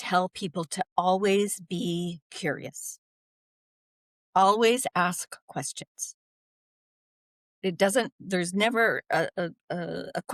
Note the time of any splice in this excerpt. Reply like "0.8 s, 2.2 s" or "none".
none